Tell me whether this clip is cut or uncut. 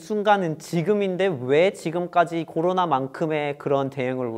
uncut